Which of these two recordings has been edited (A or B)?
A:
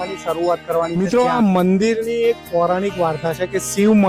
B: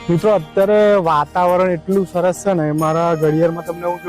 A